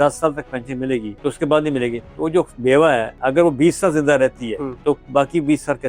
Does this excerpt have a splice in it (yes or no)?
yes